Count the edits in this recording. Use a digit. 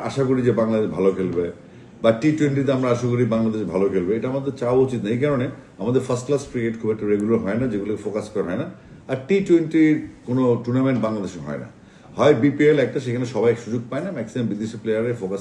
0